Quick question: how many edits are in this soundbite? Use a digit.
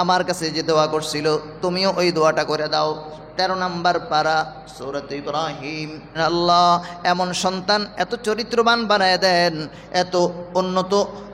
1